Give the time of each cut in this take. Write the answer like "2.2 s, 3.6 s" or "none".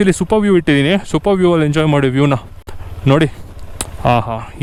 none